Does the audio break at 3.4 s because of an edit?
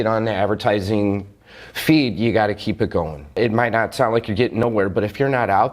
yes; 1 cut; at 3.4 s

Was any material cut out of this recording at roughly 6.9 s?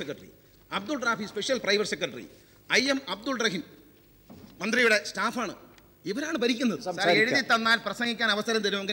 yes; 1 cut; at 6.9 s

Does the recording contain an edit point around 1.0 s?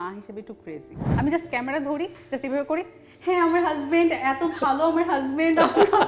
yes; 1 cut; at 1.0 s

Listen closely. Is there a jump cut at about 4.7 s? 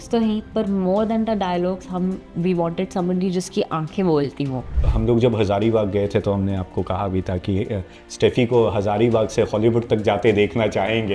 yes; 1 cut; at 4.7 s

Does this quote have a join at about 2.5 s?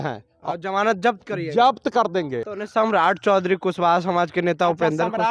yes; 1 cut; at 2.5 s

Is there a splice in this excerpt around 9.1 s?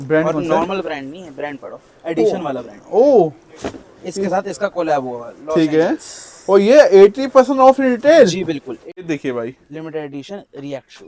yes; 1 cut; at 9.1 s

